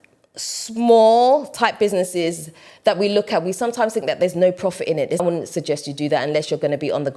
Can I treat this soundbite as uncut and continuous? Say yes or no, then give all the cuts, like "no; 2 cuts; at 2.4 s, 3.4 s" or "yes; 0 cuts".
no; 1 cut; at 5.2 s